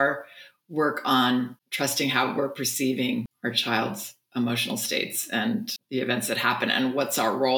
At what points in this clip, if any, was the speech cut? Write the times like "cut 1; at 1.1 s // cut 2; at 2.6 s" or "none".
cut 1; at 1.6 s // cut 2; at 3.3 s // cut 3; at 5.8 s